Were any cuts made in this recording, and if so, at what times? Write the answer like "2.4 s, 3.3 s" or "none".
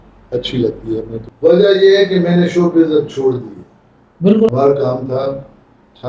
1.2 s, 4.5 s